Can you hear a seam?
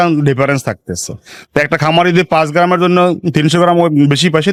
no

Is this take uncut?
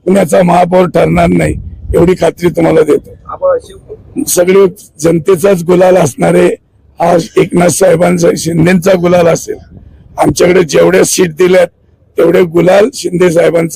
yes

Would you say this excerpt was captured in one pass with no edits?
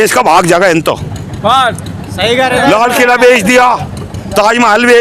yes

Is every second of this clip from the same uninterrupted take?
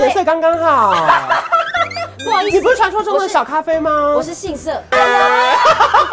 no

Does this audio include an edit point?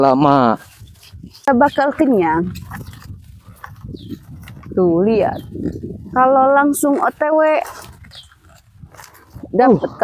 yes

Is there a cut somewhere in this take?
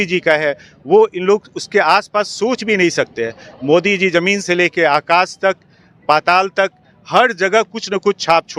no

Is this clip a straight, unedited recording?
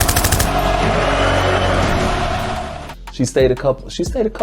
no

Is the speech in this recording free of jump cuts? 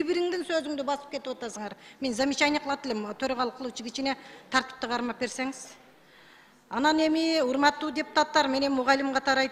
yes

